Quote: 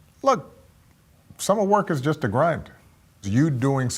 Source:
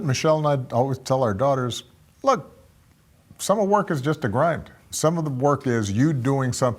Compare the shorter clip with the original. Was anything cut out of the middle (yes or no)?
yes